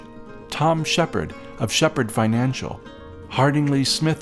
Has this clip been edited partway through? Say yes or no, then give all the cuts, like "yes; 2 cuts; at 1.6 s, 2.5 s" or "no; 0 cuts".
no; 0 cuts